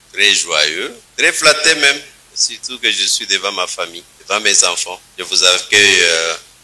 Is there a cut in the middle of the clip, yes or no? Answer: yes